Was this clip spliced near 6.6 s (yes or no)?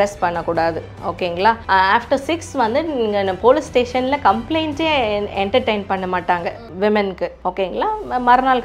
yes